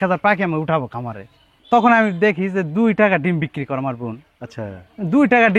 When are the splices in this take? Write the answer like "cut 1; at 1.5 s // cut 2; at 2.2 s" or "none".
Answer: cut 1; at 1.5 s

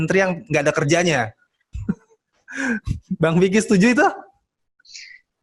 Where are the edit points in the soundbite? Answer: none

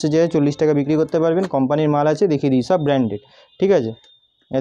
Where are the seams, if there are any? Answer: none

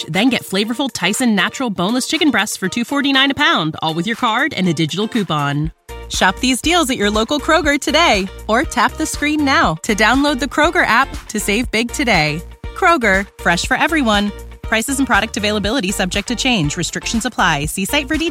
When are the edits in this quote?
none

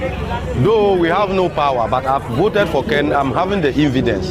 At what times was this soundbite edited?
none

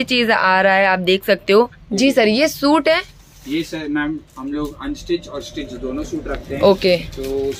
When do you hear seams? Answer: cut 1; at 1.8 s

